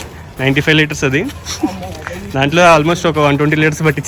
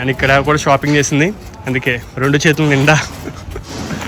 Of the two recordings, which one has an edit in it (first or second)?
second